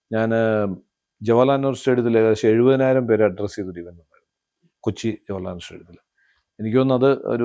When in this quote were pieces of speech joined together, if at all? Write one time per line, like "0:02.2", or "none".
none